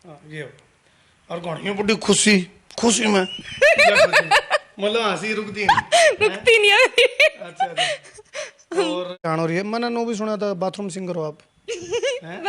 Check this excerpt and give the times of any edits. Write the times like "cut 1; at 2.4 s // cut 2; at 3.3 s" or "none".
cut 1; at 9.2 s